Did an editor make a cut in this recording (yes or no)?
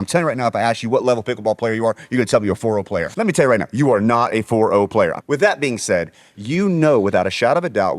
yes